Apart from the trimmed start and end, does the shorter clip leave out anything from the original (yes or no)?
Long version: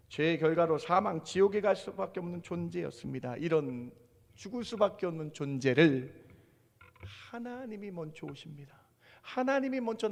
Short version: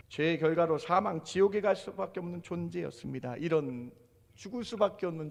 no